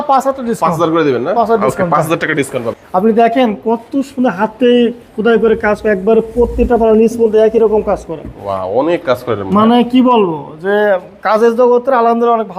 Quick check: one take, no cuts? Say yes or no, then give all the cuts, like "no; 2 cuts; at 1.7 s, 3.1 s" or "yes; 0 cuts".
no; 1 cut; at 2.8 s